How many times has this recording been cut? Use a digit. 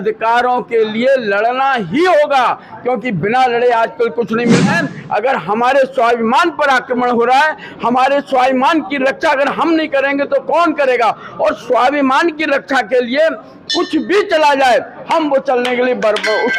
1